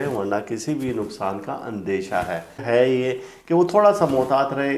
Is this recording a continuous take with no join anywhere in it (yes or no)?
no